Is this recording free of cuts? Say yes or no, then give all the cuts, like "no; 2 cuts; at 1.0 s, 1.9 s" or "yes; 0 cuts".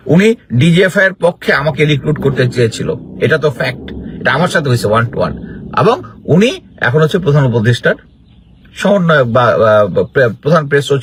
yes; 0 cuts